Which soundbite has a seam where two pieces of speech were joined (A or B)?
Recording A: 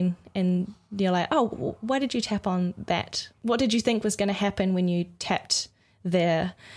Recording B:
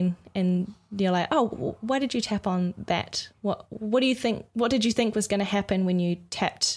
A